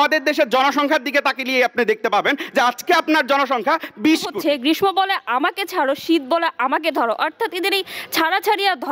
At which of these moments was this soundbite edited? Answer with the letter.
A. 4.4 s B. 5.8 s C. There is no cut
A